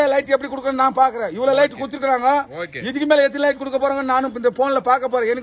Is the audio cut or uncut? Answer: uncut